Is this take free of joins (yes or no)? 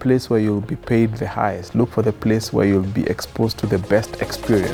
yes